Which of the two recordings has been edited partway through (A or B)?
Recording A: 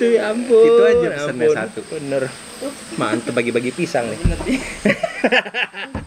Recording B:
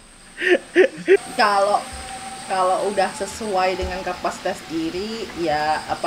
B